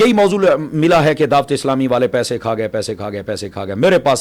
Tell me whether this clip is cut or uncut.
uncut